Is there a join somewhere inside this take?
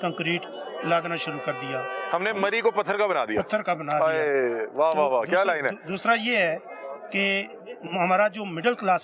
no; 0 cuts

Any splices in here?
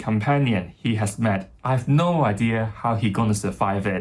no; 0 cuts

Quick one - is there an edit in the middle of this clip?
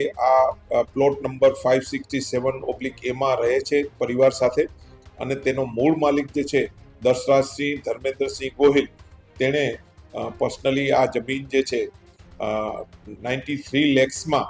no; 0 cuts

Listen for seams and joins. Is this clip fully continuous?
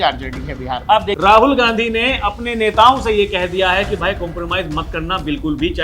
no; 1 cut; at 1.1 s

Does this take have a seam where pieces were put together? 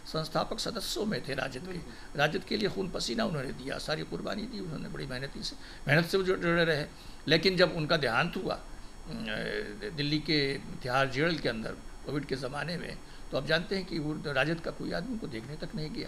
no; 0 cuts

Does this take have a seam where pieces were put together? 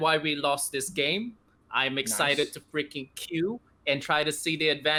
no; 0 cuts

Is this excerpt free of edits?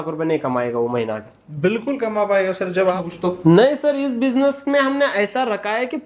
no; 1 cut; at 2.9 s

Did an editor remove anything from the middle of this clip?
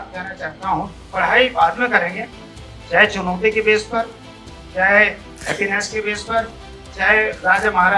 yes; 1 cut; at 1.0 s

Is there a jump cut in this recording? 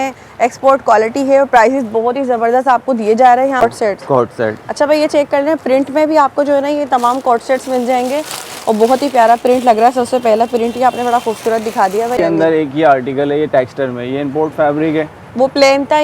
yes; 2 cuts; at 3.6 s, 12.2 s

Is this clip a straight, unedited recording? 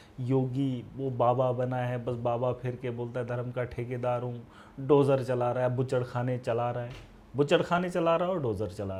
yes; 0 cuts

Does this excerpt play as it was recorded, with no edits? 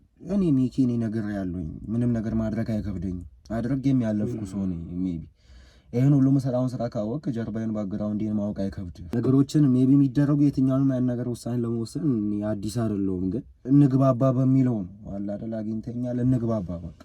no; 3 cuts; at 3.3 s, 9.0 s, 13.5 s

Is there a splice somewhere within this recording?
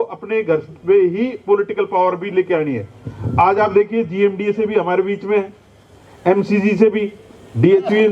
no; 0 cuts

